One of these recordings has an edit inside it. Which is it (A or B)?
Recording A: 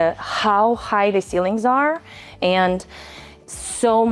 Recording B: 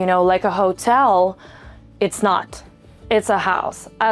A